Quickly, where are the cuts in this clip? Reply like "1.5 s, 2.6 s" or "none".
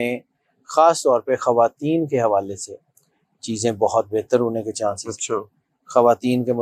none